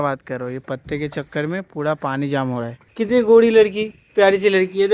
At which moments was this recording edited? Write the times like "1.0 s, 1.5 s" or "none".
2.9 s